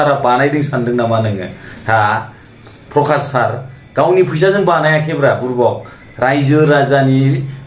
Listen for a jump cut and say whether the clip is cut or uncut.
uncut